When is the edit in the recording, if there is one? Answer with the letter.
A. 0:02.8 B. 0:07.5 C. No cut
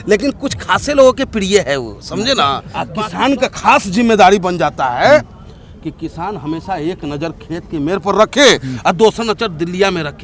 A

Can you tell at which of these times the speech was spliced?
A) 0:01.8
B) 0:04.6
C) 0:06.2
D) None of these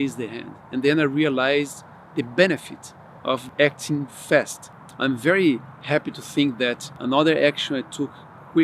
B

